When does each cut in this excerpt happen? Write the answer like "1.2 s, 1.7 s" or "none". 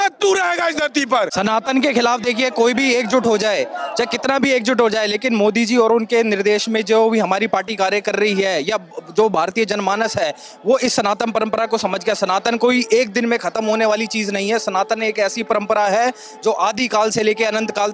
1.3 s